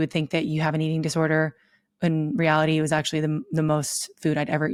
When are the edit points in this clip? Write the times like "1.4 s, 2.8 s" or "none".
none

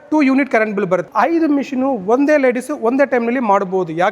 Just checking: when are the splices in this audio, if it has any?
1.1 s

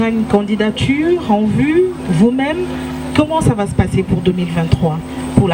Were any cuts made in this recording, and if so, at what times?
none

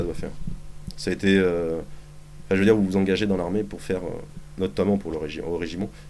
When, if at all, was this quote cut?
none

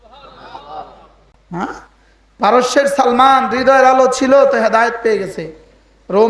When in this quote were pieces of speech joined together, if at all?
none

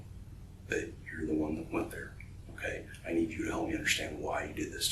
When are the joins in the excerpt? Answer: none

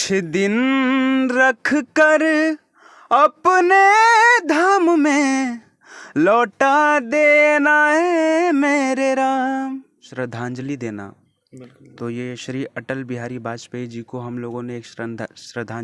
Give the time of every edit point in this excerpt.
10.1 s

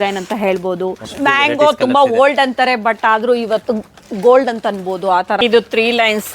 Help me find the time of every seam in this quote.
1.1 s, 5.4 s

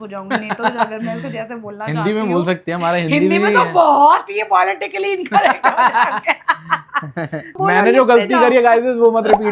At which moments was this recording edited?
7.6 s

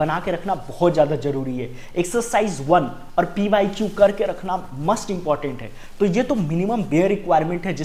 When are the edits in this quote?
none

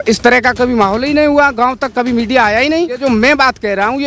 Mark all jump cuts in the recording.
3.0 s

